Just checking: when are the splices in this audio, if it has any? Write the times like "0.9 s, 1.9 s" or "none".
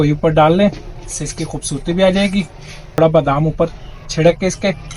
3.0 s